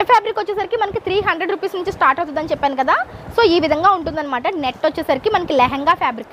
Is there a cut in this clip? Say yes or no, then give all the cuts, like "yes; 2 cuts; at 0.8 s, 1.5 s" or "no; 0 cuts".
no; 0 cuts